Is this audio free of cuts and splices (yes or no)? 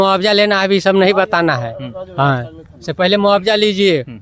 yes